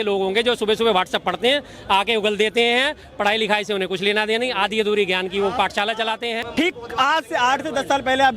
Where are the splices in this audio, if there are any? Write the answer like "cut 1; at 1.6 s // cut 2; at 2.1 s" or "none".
cut 1; at 6.4 s